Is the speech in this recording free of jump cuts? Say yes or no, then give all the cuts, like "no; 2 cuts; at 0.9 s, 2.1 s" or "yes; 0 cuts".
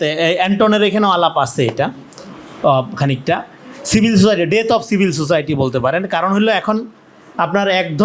yes; 0 cuts